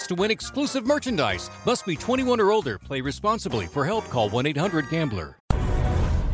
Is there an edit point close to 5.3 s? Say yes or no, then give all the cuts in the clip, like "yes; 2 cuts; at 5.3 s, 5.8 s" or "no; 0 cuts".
yes; 1 cut; at 5.3 s